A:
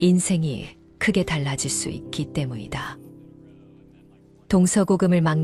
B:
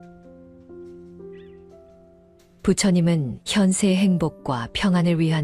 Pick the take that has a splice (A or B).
B